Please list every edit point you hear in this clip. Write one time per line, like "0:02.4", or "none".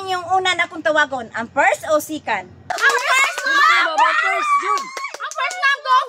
none

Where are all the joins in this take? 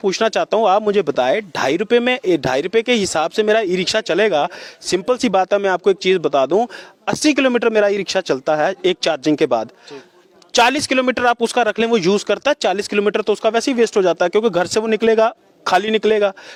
none

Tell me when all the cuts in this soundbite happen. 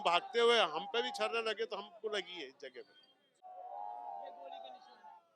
0:03.5

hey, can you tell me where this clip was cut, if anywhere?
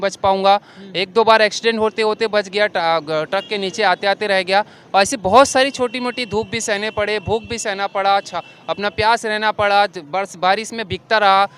none

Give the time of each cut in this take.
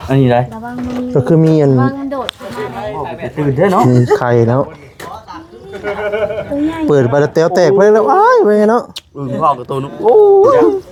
none

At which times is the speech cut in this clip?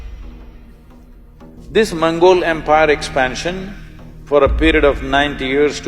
0:01.6

